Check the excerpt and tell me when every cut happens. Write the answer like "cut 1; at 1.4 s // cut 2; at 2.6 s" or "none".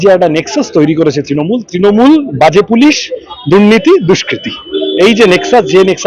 none